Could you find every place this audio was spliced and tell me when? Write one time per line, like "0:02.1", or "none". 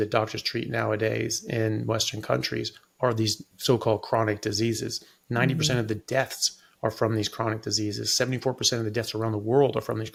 none